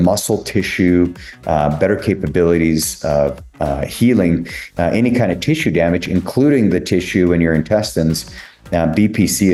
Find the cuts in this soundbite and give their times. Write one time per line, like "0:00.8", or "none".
none